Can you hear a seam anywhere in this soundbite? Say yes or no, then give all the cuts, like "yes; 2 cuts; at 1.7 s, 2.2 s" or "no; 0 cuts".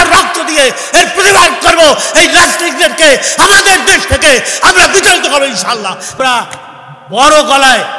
yes; 1 cut; at 6.1 s